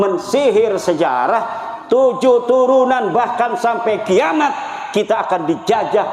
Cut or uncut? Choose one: uncut